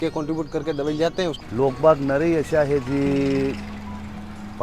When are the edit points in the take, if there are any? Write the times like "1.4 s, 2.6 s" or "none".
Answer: 1.4 s